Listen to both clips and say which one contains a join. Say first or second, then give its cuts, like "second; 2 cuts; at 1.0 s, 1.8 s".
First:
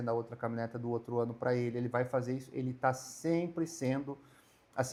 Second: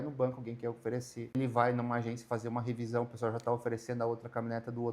second; 1 cut; at 1.4 s